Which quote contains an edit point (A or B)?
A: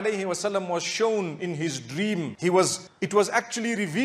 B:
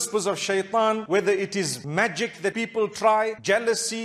B